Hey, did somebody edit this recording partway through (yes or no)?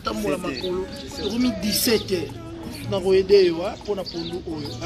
yes